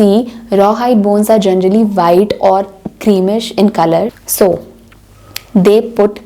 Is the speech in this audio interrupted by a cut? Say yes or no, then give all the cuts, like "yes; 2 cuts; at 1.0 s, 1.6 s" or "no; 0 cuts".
no; 0 cuts